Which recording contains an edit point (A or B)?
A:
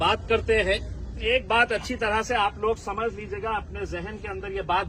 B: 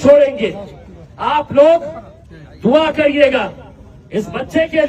A